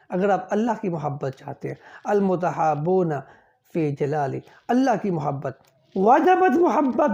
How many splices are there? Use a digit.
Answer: 0